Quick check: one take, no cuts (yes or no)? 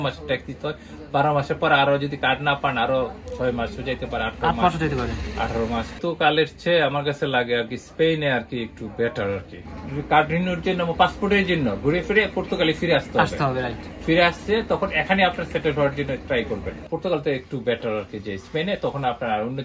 no